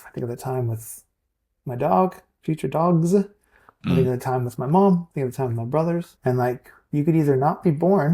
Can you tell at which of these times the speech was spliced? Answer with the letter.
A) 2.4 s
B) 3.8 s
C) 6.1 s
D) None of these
C